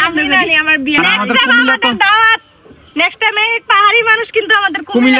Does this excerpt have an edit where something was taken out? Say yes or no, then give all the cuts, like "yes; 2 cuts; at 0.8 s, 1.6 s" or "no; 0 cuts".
yes; 1 cut; at 1.0 s